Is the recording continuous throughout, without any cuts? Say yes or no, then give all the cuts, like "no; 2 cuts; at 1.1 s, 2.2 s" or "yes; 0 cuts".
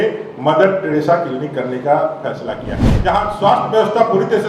no; 1 cut; at 2.9 s